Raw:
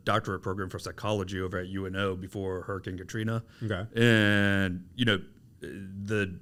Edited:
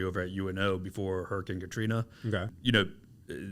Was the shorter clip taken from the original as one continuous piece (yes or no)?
no